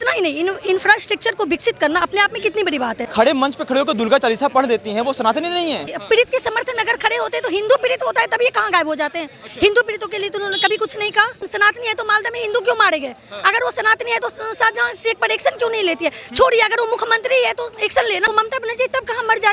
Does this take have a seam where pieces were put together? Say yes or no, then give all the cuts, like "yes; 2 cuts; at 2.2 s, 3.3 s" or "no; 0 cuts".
yes; 4 cuts; at 3.0 s, 5.9 s, 11.4 s, 18.3 s